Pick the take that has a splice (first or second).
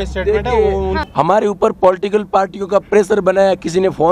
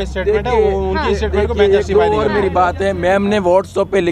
first